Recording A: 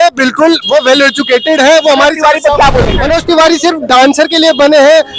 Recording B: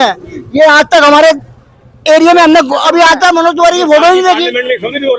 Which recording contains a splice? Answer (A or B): A